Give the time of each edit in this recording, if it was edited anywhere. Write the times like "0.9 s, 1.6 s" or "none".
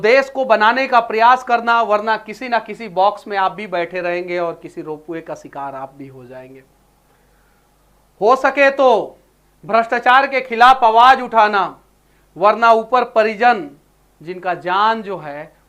none